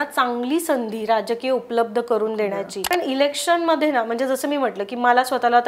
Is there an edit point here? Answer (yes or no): yes